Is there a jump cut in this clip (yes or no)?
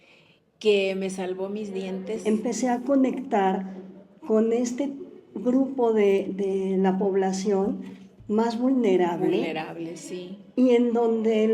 yes